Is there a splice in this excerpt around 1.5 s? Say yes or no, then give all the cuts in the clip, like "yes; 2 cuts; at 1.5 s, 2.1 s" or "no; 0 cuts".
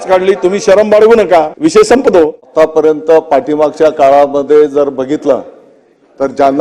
yes; 2 cuts; at 1.5 s, 2.4 s